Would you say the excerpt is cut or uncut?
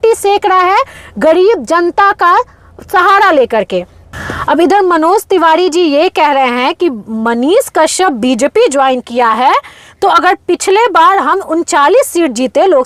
uncut